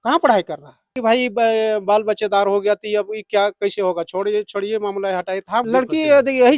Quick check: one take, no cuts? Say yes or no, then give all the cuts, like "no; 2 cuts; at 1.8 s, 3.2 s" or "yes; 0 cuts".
no; 2 cuts; at 1.0 s, 5.7 s